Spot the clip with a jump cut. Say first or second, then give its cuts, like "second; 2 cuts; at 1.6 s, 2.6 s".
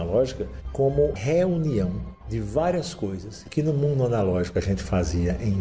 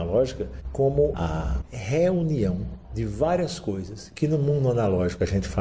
first; 1 cut; at 1.2 s